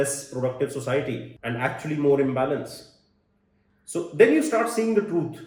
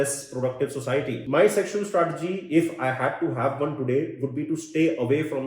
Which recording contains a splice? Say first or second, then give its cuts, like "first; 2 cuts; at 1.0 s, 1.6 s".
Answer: second; 1 cut; at 1.2 s